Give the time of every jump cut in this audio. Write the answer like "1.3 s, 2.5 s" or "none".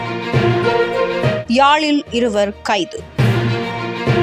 none